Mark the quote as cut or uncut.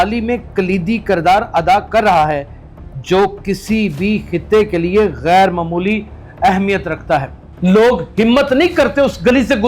cut